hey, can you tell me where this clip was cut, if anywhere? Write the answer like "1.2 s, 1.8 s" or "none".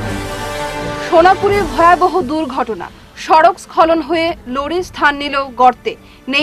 1.0 s